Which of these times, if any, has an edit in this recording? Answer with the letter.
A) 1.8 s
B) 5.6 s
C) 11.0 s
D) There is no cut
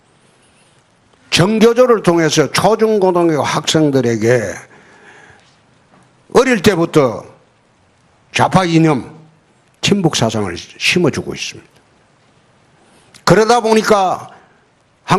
D